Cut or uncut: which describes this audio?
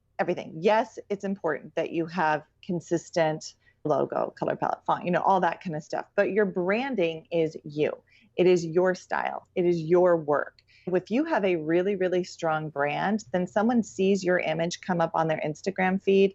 cut